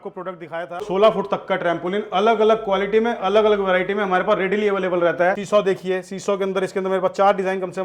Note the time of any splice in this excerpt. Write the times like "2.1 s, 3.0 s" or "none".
0.8 s, 5.4 s